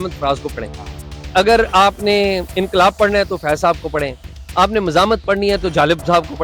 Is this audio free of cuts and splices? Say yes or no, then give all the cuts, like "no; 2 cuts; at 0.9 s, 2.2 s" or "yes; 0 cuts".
yes; 0 cuts